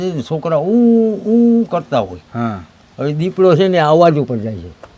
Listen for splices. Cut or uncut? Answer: uncut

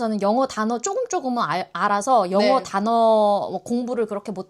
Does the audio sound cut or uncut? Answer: uncut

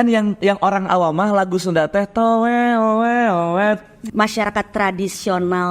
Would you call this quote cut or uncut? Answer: cut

